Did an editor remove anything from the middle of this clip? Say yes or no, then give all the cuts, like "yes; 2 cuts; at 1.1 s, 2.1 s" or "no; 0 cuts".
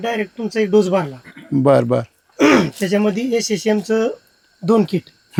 no; 0 cuts